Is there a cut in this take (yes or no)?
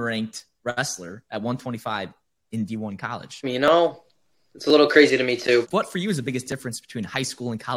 yes